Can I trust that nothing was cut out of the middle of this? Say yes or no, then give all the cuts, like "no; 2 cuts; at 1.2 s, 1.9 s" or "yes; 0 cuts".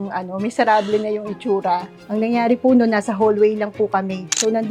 yes; 0 cuts